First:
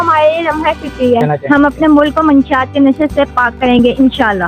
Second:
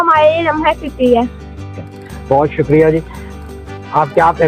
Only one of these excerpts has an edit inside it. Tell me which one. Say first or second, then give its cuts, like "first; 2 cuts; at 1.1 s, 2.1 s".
first; 1 cut; at 1.3 s